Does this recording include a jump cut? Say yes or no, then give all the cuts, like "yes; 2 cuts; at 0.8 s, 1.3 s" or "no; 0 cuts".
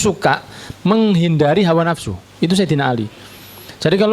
no; 0 cuts